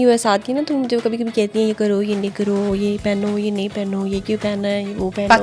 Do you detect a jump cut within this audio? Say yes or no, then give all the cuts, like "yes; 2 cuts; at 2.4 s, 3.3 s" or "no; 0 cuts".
no; 0 cuts